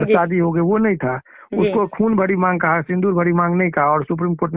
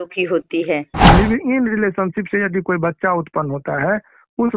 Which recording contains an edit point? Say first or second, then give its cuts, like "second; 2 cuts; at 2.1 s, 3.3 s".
second; 1 cut; at 1.0 s